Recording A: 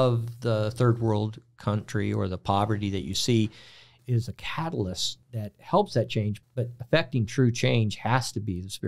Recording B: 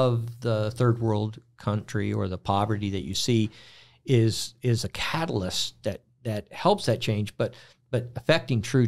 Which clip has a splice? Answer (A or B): A